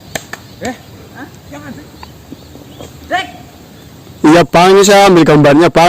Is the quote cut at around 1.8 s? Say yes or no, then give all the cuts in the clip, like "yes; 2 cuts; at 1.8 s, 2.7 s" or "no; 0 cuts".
yes; 1 cut; at 1.8 s